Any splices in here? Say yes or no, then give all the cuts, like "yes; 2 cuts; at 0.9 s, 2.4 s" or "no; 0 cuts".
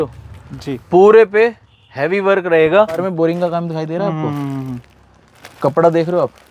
yes; 1 cut; at 3.1 s